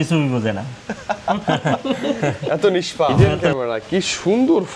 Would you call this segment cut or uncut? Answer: cut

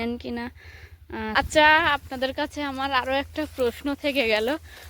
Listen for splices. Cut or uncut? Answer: cut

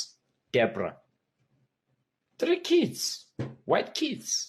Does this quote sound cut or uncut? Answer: uncut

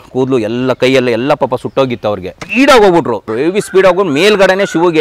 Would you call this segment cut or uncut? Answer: cut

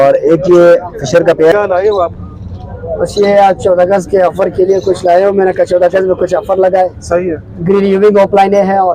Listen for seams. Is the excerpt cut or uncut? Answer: cut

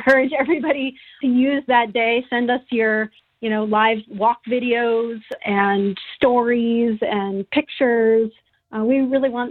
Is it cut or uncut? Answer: cut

